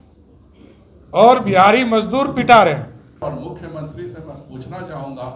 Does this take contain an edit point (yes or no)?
yes